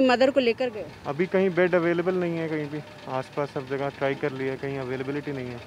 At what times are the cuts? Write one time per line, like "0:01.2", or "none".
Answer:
none